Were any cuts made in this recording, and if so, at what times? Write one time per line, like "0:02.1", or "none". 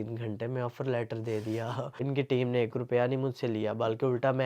0:02.0